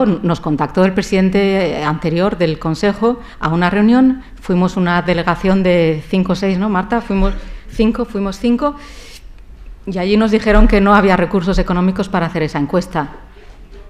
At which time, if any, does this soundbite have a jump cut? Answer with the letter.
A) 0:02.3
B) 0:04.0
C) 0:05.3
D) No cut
A